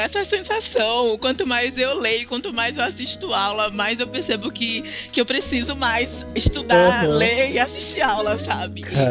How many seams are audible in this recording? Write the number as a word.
zero